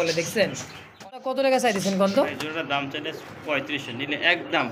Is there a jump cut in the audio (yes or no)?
yes